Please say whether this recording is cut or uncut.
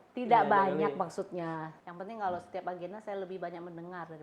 cut